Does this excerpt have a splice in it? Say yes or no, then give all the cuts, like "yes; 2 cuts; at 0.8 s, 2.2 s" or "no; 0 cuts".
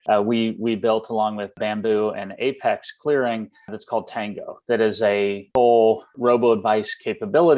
yes; 4 cuts; at 1.6 s, 3.8 s, 5.4 s, 6.1 s